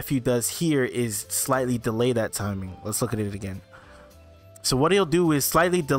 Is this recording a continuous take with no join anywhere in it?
yes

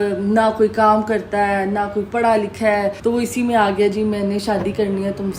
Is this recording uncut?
no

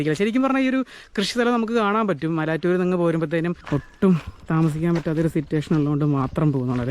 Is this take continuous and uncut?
no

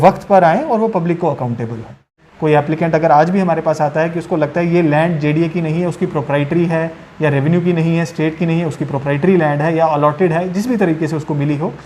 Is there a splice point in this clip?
yes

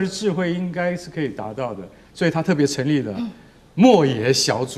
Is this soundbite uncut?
yes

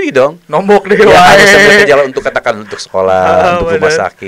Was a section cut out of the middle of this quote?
no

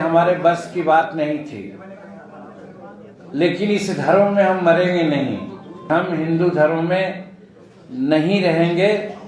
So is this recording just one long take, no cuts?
no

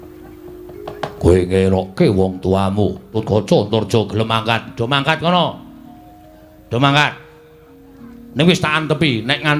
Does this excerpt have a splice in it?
yes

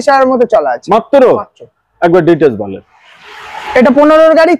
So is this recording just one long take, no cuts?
yes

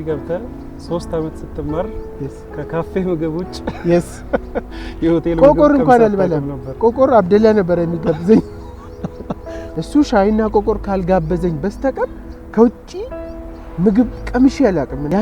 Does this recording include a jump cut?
no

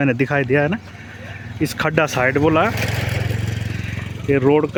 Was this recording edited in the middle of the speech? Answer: no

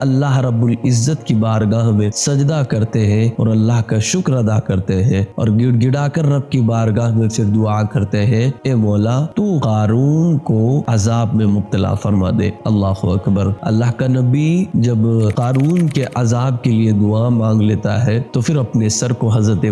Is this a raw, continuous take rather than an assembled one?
yes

